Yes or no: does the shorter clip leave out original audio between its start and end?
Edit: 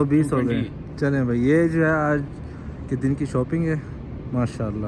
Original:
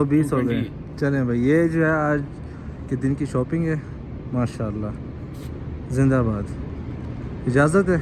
no